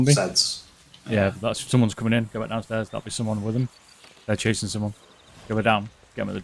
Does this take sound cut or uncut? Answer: uncut